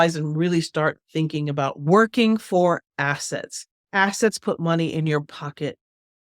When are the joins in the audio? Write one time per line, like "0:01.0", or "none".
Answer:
0:01.3